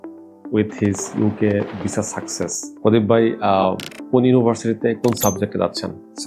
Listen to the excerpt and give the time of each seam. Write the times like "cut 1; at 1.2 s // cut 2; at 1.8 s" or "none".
cut 1; at 2.6 s

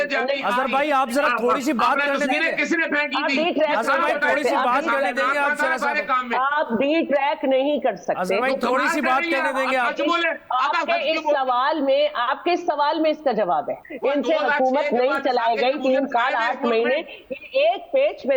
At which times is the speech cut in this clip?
cut 1; at 13.8 s

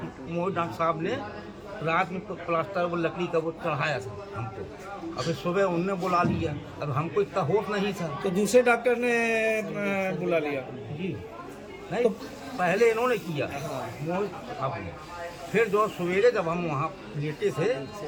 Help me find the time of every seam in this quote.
none

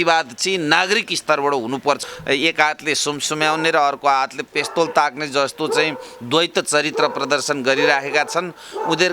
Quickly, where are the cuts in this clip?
cut 1; at 2.0 s

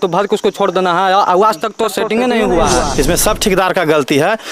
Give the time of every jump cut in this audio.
cut 1; at 2.8 s

